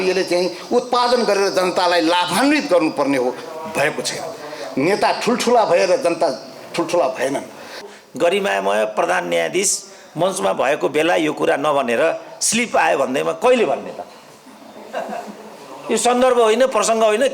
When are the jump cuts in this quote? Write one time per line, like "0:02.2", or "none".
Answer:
0:07.8